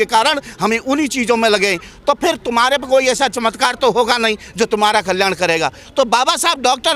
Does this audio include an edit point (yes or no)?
no